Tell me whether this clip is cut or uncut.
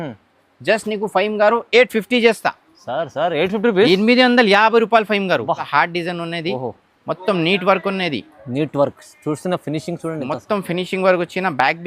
cut